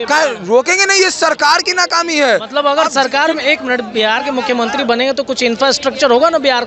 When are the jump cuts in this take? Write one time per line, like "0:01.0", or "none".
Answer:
none